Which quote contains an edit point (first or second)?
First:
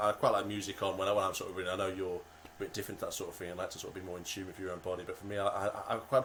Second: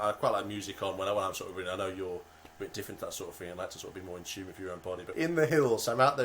second